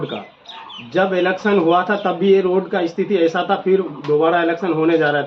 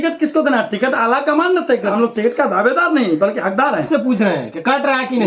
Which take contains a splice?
second; 2 cuts; at 1.9 s, 3.9 s

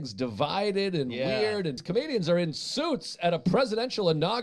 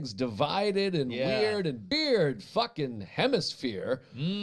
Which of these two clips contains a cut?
first; 1 cut; at 1.8 s

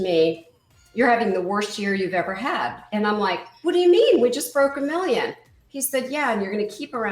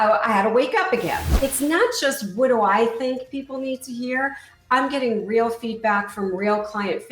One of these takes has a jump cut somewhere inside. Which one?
second; 1 cut; at 1.3 s

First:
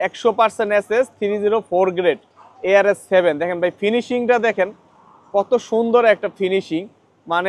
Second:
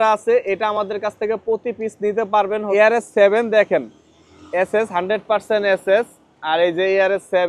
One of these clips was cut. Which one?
second; 1 cut; at 2.7 s

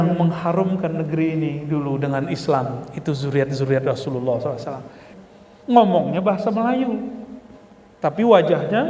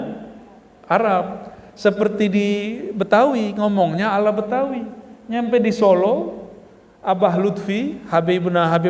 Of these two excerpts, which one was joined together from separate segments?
first; 1 cut; at 5.1 s

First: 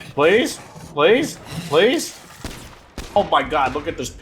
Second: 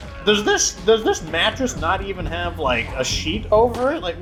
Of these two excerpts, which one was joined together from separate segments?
first; 1 cut; at 3.2 s

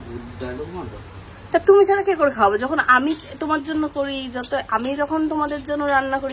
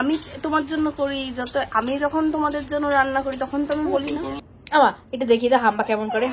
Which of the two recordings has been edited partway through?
second; 1 cut; at 4.5 s

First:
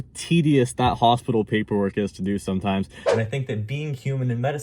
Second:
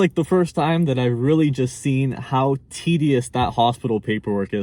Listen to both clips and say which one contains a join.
first; 1 cut; at 3.0 s

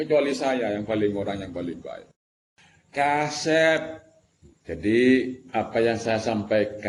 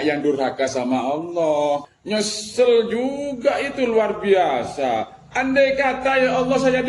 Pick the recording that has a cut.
second; 1 cut; at 1.9 s

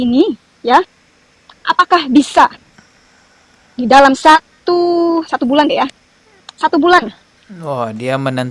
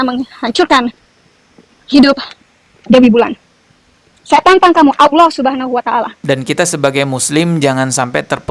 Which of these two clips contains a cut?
second; 1 cut; at 6.2 s

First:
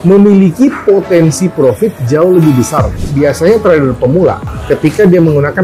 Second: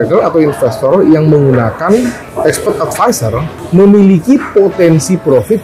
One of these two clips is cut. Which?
first; 2 cuts; at 2.9 s, 4.5 s

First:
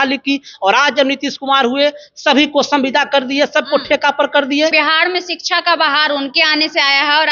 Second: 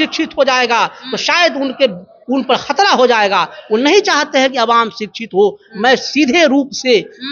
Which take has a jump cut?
first; 1 cut; at 4.7 s

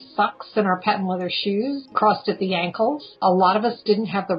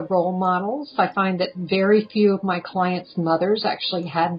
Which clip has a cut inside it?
first; 2 cuts; at 1.9 s, 3.2 s

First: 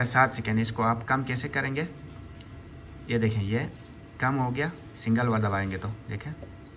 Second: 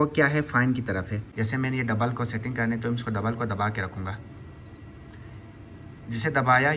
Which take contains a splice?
second; 1 cut; at 1.2 s

